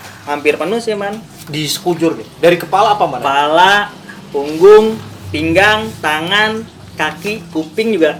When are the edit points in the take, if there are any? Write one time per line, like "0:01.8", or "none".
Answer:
none

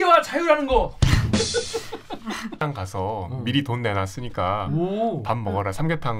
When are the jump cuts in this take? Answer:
0:02.6

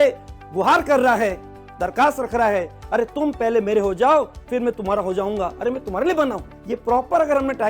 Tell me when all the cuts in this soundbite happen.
0:06.5

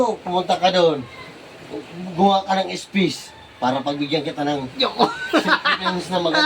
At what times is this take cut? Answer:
none

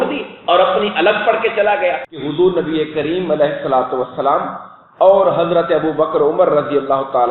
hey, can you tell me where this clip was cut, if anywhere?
0:02.1

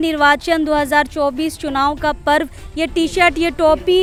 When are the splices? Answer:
none

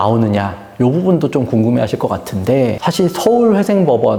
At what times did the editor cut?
none

